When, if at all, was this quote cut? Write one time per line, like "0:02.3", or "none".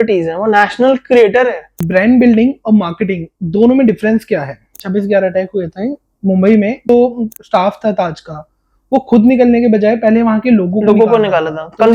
0:01.8
0:04.7
0:06.9